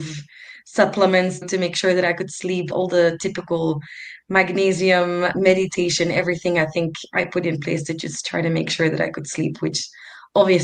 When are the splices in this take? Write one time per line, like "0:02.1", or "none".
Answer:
0:01.5
0:02.7
0:05.3